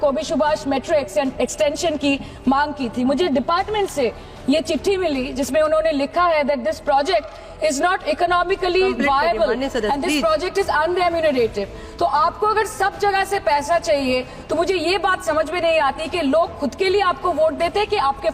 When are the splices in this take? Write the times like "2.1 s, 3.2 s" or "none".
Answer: none